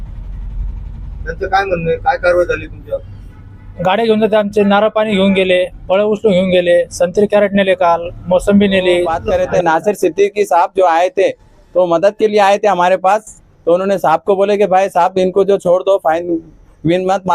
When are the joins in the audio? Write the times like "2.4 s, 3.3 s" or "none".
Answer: 9.1 s

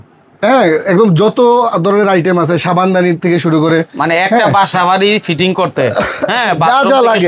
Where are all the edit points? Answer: none

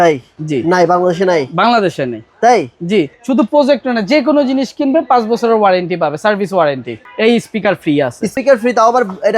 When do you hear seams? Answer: 3.1 s, 6.9 s, 8.3 s

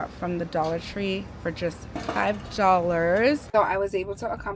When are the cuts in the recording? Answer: 3.4 s

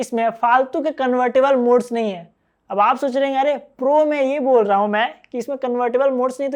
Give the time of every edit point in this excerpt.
none

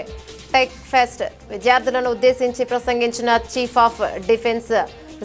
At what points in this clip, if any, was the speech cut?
none

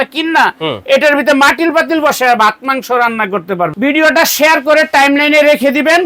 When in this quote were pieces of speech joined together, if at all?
3.7 s

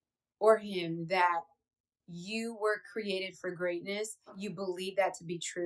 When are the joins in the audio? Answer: 4.4 s

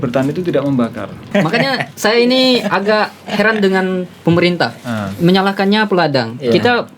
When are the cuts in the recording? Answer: 1.3 s

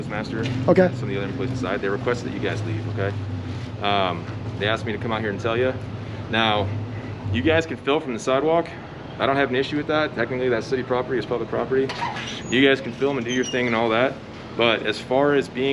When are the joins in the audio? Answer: none

